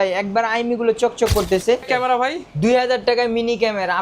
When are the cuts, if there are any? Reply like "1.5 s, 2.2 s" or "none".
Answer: 1.8 s